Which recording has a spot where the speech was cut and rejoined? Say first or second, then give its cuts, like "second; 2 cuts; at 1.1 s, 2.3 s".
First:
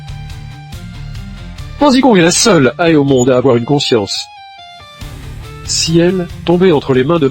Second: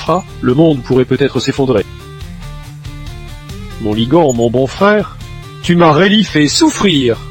first; 1 cut; at 1.8 s